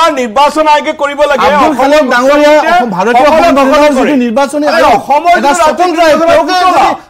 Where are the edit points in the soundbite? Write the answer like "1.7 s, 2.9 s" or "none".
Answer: none